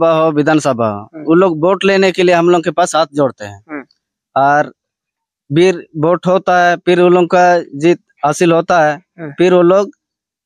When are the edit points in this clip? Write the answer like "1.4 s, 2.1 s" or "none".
none